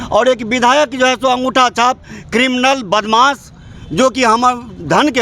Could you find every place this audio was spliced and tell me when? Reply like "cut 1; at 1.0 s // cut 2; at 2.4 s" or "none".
none